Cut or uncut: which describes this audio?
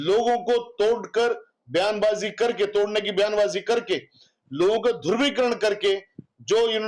uncut